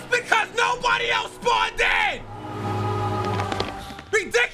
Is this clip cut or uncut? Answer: uncut